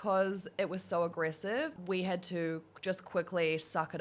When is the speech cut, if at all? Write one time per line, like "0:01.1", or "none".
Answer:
0:01.8